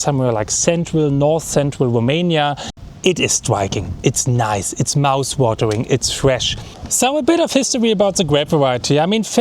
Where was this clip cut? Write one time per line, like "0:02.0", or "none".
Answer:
0:02.7
0:06.7